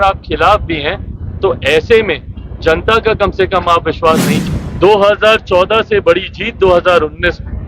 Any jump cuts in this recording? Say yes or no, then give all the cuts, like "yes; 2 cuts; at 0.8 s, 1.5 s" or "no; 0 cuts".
yes; 1 cut; at 4.4 s